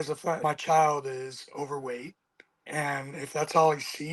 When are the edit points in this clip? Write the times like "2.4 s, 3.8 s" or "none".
none